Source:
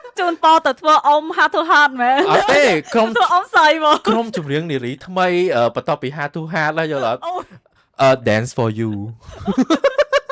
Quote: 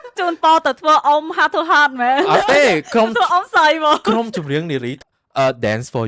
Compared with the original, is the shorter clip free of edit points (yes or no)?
no